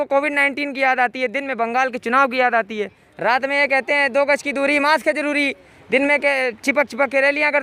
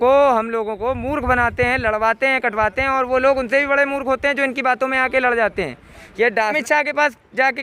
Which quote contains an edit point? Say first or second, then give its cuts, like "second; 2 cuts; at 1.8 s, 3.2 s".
second; 1 cut; at 6.6 s